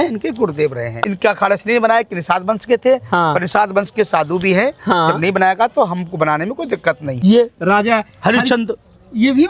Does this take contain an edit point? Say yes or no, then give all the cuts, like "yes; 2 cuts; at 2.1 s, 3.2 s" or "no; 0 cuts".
yes; 2 cuts; at 1.0 s, 7.1 s